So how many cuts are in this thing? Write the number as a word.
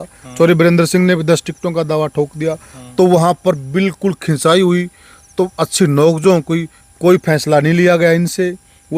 zero